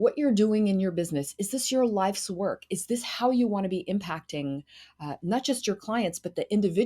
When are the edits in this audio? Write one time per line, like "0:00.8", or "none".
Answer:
none